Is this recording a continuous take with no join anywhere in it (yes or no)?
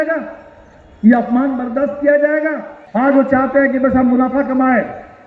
no